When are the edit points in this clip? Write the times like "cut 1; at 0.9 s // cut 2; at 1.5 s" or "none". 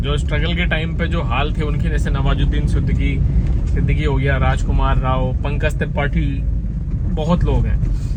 none